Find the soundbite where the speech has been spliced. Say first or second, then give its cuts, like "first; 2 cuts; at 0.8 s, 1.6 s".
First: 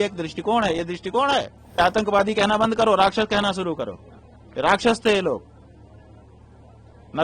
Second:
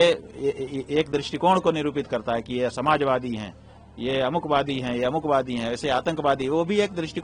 first; 1 cut; at 1.8 s